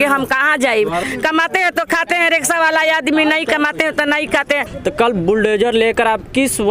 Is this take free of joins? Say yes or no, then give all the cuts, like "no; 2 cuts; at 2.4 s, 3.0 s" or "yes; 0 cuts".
no; 2 cuts; at 1.1 s, 4.7 s